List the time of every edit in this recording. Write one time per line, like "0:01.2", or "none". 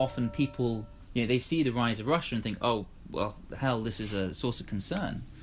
0:00.9

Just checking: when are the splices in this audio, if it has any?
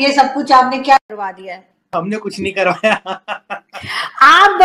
none

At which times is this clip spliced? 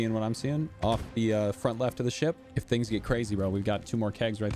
0:02.5

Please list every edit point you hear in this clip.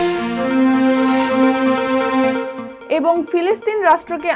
none

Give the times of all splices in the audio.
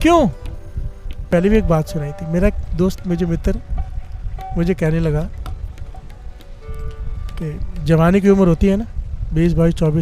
0:01.3

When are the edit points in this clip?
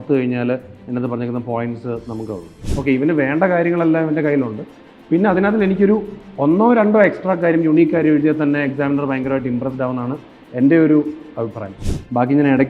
0:02.6
0:11.6

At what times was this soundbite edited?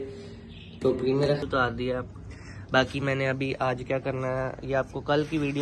0:01.4

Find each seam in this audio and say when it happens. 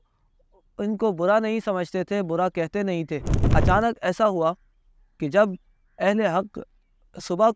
0:03.4

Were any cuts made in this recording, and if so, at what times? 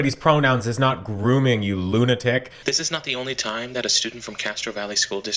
0:02.5

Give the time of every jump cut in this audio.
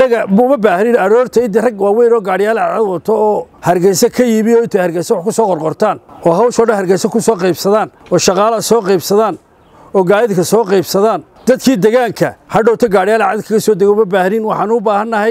0:03.5
0:06.1
0:08.0
0:12.4

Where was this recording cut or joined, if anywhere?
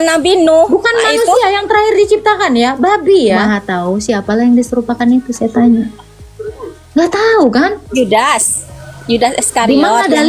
0:03.7

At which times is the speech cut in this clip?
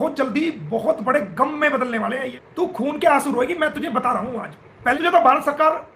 0:02.4
0:05.0

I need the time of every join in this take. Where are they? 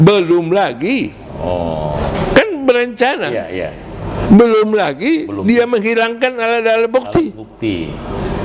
none

